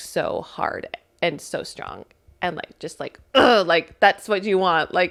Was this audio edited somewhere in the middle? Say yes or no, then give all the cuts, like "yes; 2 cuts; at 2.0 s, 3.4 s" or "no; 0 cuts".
no; 0 cuts